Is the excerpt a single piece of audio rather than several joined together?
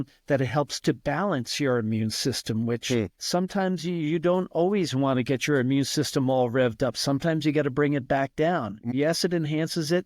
no; 1 cut; at 8.9 s

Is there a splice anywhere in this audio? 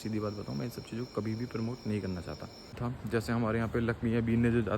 yes; 1 cut; at 2.8 s

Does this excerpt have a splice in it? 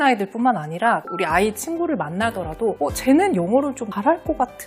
no; 0 cuts

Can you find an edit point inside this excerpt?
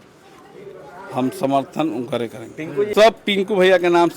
yes; 1 cut; at 2.9 s

